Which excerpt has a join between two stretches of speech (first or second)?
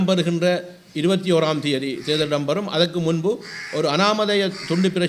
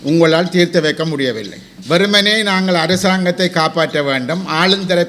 second